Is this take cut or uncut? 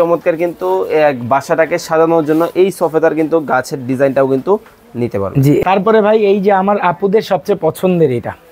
cut